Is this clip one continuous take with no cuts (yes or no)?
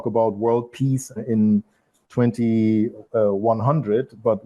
yes